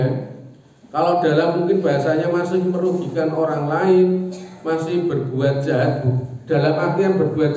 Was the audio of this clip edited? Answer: no; 0 cuts

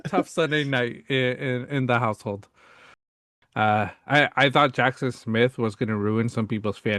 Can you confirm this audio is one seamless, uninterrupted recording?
no; 1 cut; at 3.1 s

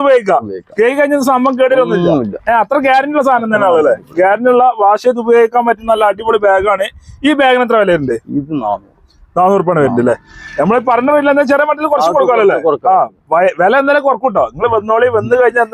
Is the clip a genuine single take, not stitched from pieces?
yes; 0 cuts

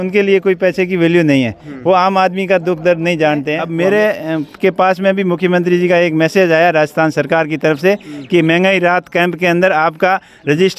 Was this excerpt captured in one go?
no; 1 cut; at 3.6 s

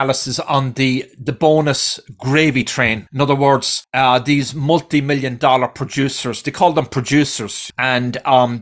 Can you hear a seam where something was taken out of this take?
yes; 2 cuts; at 3.0 s, 3.8 s

